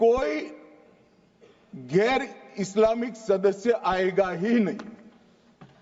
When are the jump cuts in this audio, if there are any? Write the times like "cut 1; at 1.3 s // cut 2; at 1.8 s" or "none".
none